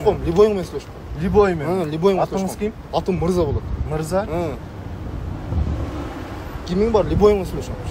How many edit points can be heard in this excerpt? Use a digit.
0